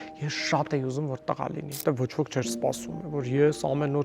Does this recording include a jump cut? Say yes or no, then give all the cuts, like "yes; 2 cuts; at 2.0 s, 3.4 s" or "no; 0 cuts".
yes; 1 cut; at 1.8 s